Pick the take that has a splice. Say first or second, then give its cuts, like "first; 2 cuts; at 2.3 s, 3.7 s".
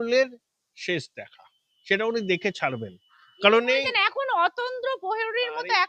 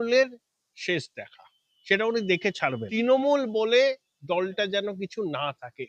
second; 1 cut; at 2.8 s